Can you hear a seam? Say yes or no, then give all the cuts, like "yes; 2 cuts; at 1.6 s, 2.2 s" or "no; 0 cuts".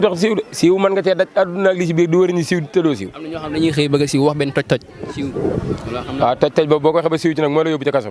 no; 0 cuts